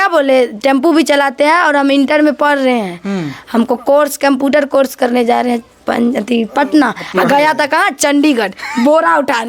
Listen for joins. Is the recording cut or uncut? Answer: uncut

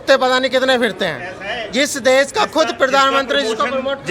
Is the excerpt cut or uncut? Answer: uncut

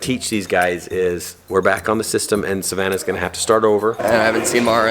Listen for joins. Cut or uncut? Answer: cut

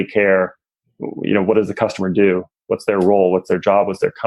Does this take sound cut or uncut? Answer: uncut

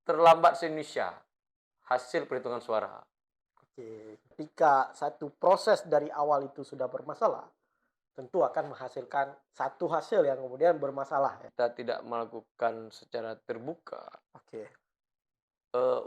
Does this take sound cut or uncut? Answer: cut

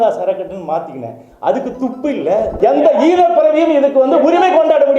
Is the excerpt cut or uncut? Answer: cut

